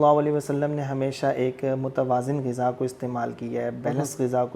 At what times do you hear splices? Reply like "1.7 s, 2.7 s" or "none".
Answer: none